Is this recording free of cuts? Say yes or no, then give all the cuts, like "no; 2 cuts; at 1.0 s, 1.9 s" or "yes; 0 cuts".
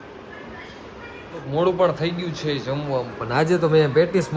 no; 1 cut; at 1.5 s